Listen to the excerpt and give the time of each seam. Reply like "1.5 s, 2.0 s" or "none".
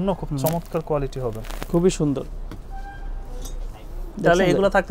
none